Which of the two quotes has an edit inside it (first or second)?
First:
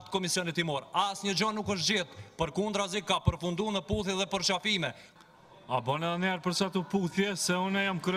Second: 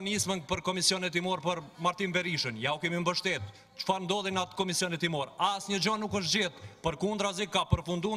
first